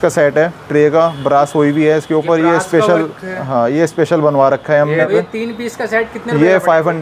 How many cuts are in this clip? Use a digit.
1